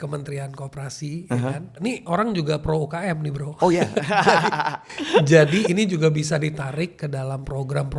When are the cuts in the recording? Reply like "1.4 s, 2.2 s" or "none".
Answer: 1.7 s